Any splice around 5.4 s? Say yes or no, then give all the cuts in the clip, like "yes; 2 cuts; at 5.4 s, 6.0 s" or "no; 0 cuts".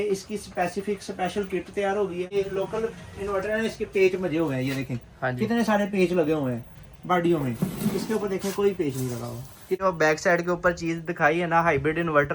no; 2 cuts; at 2.3 s, 9.8 s